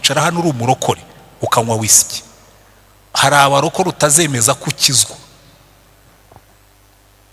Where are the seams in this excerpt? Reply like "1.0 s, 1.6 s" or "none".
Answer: none